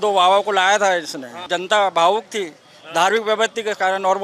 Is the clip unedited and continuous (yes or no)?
no